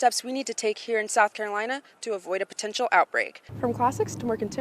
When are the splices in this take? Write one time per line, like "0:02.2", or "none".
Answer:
0:03.4